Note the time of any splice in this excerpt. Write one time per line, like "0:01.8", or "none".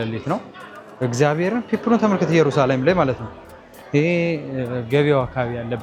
none